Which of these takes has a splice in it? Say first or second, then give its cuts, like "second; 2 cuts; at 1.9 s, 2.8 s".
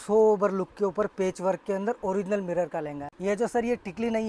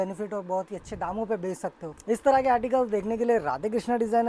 second; 1 cut; at 1.9 s